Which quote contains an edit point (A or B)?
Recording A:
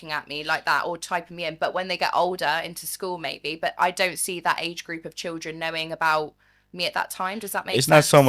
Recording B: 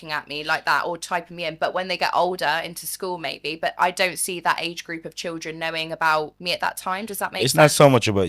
B